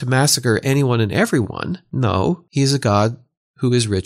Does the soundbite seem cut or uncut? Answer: cut